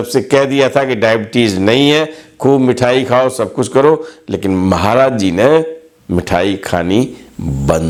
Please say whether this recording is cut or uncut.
uncut